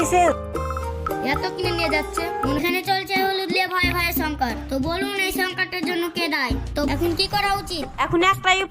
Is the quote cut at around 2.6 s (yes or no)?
yes